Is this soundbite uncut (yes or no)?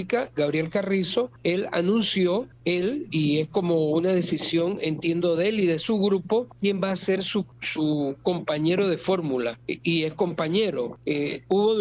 no